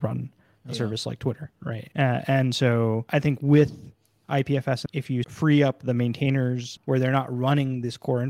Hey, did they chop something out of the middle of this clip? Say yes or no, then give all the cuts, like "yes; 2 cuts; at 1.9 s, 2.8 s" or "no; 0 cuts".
yes; 4 cuts; at 1.8 s, 3.0 s, 5.1 s, 6.7 s